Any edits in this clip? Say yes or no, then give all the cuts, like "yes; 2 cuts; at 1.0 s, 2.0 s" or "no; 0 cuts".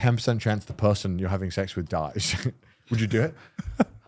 no; 0 cuts